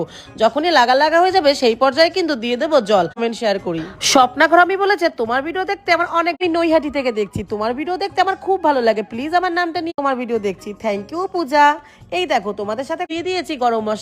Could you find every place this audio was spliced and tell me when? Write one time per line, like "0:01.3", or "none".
0:03.2
0:06.4
0:09.9
0:13.1